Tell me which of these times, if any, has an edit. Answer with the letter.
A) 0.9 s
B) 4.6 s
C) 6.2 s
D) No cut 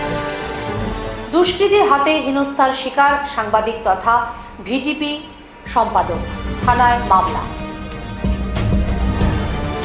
A